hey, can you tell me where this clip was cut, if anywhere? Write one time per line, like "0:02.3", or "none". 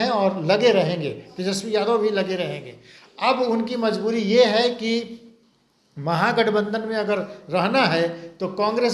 none